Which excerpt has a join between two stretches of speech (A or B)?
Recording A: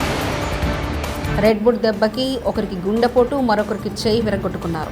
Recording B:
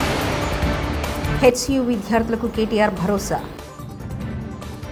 A